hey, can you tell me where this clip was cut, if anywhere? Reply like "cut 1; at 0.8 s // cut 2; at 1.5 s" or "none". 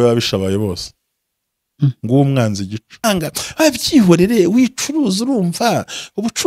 cut 1; at 3.1 s